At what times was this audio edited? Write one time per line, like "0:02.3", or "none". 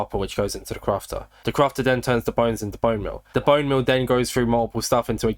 none

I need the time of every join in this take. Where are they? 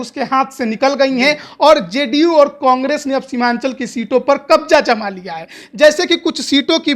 none

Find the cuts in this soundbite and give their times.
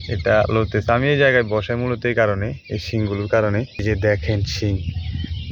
0:03.8

